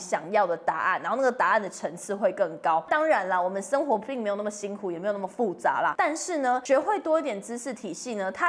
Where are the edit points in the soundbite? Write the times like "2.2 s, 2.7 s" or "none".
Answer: 2.9 s, 6.3 s